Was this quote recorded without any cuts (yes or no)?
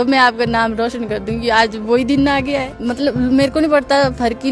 no